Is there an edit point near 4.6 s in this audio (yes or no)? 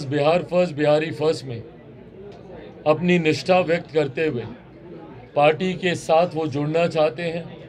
no